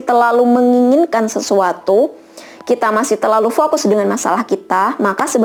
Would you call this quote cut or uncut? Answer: uncut